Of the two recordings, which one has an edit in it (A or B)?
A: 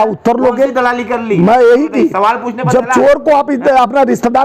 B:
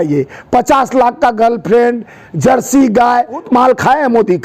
B